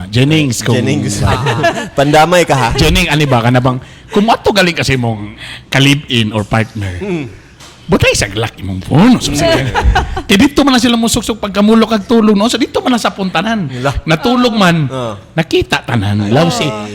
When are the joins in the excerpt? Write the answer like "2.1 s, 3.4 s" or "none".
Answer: none